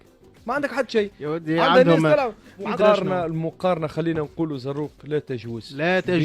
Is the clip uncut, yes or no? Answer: no